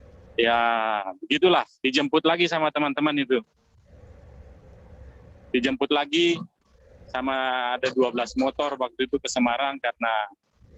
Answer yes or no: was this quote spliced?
no